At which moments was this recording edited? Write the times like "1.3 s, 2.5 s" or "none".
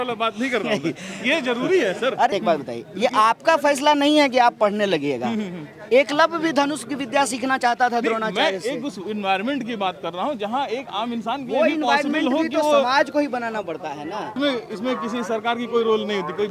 2.3 s, 14.3 s